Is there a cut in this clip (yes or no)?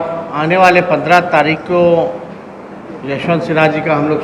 no